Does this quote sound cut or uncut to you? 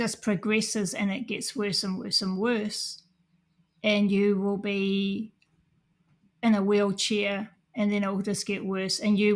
uncut